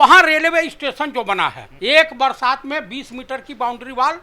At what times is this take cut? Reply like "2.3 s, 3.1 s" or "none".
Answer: 1.7 s